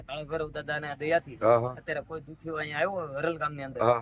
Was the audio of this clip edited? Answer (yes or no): no